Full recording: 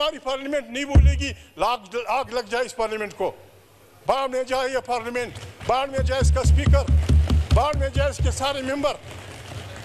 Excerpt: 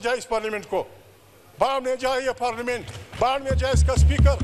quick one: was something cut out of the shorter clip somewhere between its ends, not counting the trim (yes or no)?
no